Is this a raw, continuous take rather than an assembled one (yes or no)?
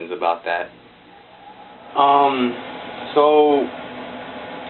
yes